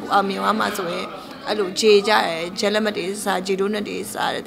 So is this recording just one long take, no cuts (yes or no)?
yes